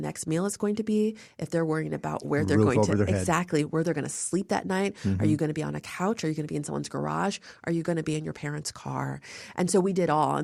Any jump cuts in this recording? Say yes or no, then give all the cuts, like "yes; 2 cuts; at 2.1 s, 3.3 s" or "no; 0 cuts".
no; 0 cuts